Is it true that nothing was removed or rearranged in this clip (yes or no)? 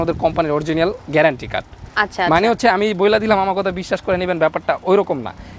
yes